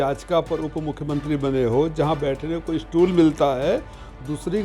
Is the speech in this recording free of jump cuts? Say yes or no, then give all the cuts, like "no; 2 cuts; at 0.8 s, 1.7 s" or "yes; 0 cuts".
yes; 0 cuts